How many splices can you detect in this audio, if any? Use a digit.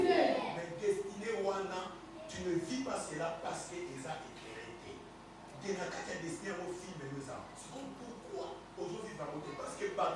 0